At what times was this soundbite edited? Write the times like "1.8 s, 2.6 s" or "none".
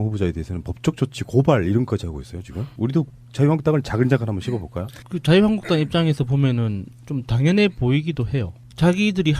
8.1 s